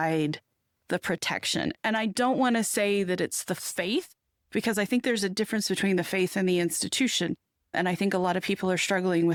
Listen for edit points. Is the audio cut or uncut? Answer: uncut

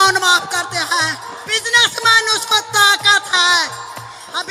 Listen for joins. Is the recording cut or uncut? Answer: cut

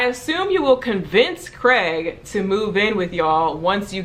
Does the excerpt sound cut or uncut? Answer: uncut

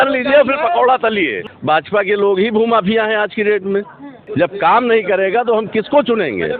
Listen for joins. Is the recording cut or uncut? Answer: cut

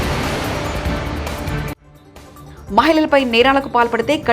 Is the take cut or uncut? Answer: cut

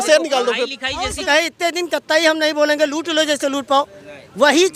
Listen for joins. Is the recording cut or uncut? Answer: cut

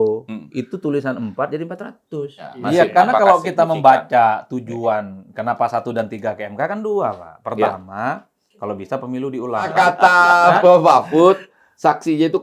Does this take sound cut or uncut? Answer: cut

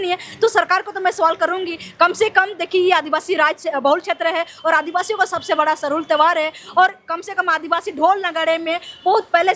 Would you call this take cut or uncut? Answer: uncut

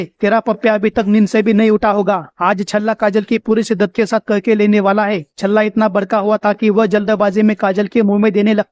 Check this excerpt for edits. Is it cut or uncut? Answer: uncut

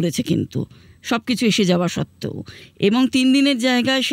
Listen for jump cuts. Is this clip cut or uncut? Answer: uncut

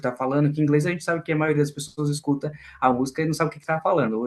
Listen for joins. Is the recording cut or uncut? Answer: uncut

